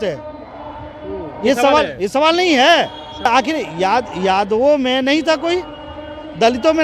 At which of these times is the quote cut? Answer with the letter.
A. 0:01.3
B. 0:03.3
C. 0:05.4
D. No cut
B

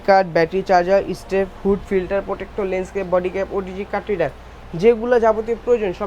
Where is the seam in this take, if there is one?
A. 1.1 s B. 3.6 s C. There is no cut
C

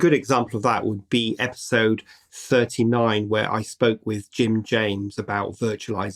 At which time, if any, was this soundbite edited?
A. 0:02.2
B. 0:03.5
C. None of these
C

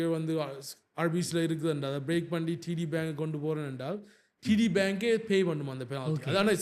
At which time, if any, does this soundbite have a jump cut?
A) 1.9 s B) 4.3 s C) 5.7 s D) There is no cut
D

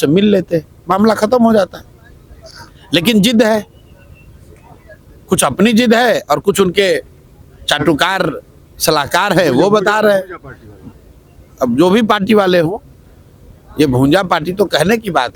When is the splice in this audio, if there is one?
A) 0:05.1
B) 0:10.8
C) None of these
C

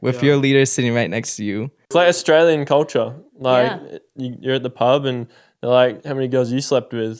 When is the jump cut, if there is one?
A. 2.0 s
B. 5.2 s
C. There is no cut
A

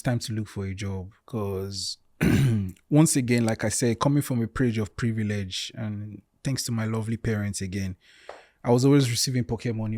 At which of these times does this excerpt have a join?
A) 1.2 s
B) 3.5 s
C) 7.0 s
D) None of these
A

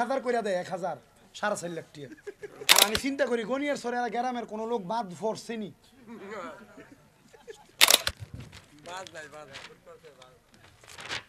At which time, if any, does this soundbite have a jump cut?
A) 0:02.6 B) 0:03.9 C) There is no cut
A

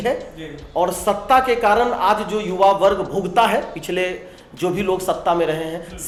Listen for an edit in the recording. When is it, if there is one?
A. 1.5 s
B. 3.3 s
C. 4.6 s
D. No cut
D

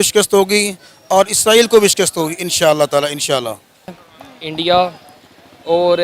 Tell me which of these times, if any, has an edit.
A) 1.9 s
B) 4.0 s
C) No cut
B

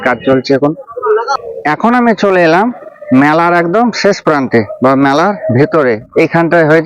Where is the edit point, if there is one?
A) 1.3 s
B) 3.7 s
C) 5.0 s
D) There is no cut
A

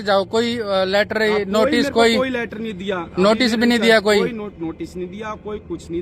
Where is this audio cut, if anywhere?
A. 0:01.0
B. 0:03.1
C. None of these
C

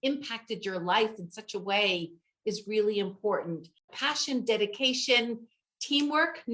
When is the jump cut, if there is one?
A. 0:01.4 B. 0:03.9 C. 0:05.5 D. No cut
B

